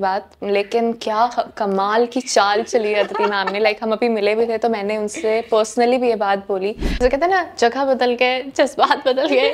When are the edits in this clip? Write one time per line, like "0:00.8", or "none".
0:06.8